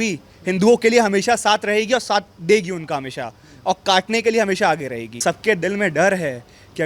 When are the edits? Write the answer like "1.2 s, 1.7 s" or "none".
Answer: 5.2 s